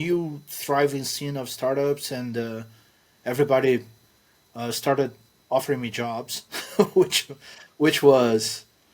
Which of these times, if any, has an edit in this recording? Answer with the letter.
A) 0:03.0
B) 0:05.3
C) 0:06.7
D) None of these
D